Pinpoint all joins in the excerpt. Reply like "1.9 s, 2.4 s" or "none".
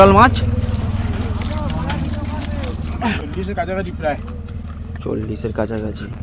3.2 s